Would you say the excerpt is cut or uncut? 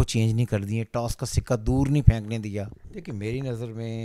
cut